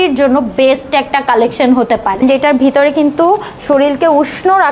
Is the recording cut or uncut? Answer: cut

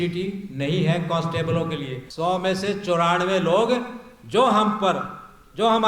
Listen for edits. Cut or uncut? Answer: cut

